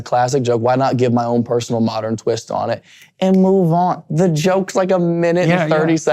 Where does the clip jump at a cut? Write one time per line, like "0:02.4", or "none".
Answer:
none